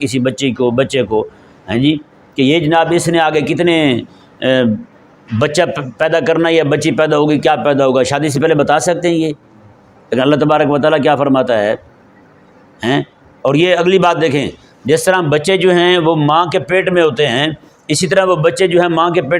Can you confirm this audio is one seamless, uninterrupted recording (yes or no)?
yes